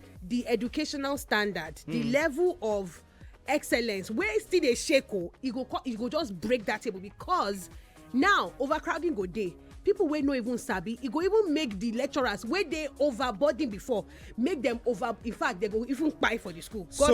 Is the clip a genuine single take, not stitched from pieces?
yes; 0 cuts

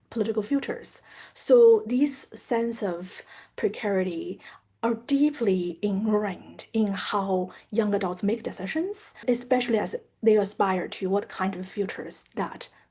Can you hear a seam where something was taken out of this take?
yes; 1 cut; at 9.2 s

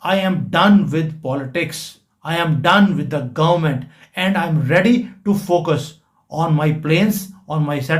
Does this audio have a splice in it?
no; 0 cuts

